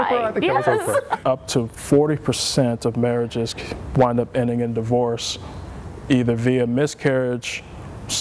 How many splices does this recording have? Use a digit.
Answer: 1